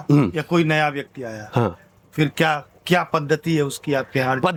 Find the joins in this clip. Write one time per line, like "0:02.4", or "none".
none